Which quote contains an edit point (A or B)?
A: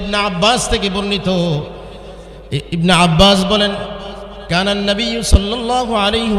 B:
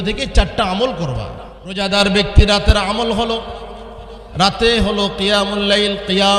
B